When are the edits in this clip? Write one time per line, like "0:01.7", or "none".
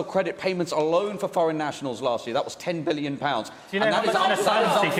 none